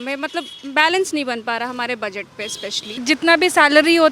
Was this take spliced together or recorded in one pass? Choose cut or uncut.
cut